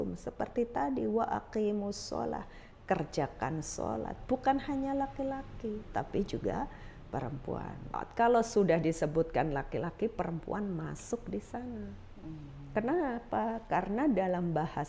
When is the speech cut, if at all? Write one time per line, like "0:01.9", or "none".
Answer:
0:08.0